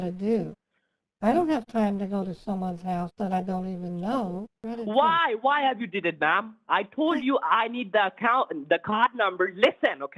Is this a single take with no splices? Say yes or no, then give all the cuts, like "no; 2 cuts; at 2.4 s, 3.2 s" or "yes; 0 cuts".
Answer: no; 1 cut; at 4.5 s